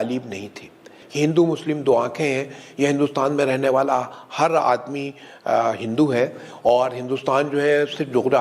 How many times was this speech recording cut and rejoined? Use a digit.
1